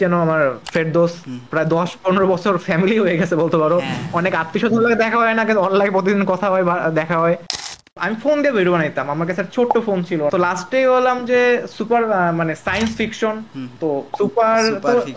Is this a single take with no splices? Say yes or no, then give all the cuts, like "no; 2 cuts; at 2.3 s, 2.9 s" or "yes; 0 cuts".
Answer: no; 2 cuts; at 7.8 s, 10.3 s